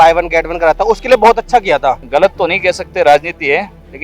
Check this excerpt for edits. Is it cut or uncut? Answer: cut